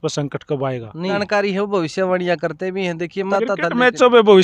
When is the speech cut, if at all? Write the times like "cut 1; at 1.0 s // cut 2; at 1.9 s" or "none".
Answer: cut 1; at 1.2 s // cut 2; at 3.3 s